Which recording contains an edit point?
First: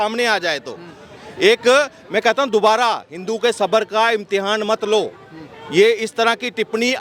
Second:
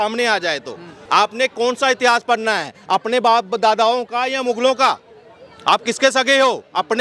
second; 1 cut; at 0.9 s

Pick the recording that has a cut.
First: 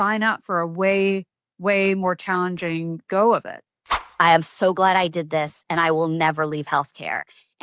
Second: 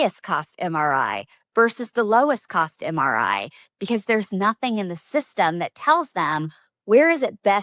first; 1 cut; at 4.1 s

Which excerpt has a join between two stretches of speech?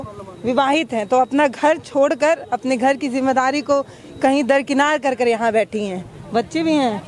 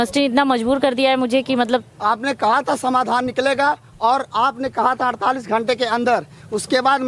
second; 1 cut; at 1.9 s

